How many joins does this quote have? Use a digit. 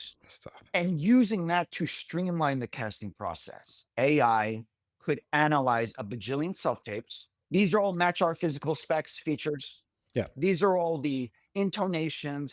2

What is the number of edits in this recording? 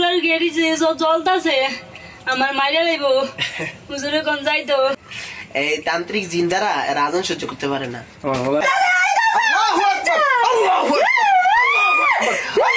2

